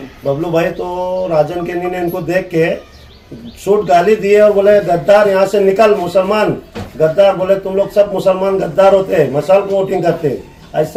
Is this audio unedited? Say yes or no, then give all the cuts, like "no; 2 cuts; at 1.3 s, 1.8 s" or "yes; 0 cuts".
yes; 0 cuts